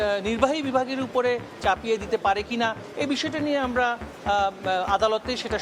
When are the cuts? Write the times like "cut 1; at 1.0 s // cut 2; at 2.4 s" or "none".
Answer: none